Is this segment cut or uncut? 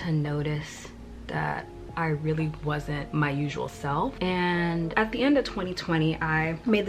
uncut